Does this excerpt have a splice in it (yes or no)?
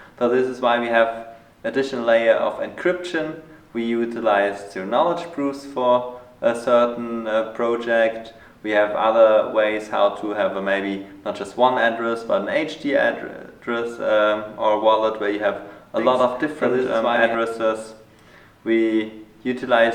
no